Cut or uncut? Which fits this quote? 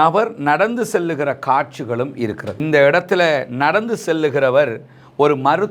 cut